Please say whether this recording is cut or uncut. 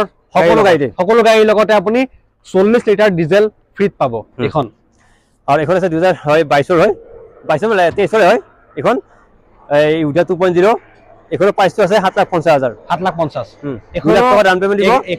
uncut